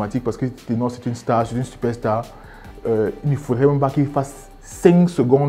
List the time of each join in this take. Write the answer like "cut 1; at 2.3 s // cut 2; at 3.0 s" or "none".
none